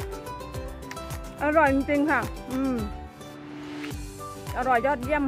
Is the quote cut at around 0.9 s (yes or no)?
no